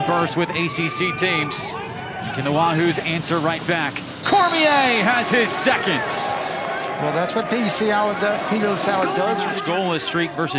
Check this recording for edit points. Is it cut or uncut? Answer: cut